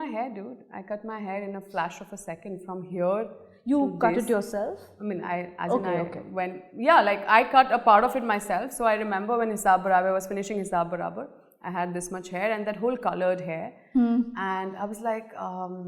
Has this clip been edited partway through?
no; 0 cuts

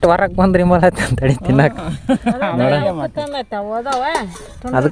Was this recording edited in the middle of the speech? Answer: no; 0 cuts

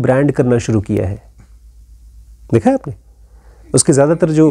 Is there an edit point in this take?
no; 0 cuts

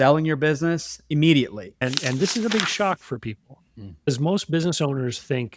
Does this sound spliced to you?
yes; 1 cut; at 1.8 s

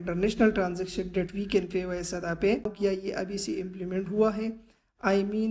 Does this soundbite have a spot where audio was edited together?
yes; 1 cut; at 2.7 s

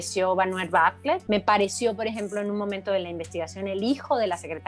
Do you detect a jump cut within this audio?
yes; 1 cut; at 1.2 s

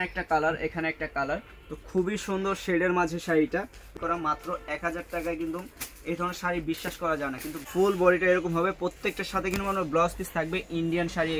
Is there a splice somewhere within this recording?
yes; 2 cuts; at 3.9 s, 7.7 s

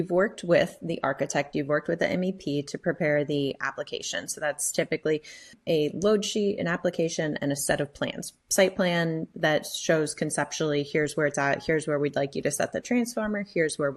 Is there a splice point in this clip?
no; 0 cuts

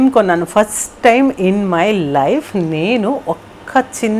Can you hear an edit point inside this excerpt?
no; 0 cuts

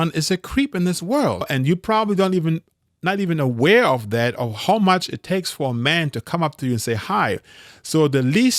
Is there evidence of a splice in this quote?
yes; 1 cut; at 1.5 s

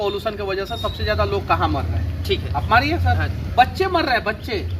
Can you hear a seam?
no; 0 cuts

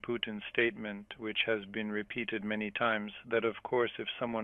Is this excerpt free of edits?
yes; 0 cuts

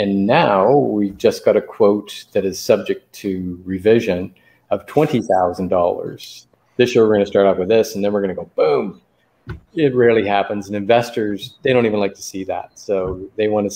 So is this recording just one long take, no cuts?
no; 1 cut; at 6.4 s

